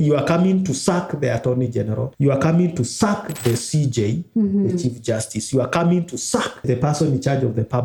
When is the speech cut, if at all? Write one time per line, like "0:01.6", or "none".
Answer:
none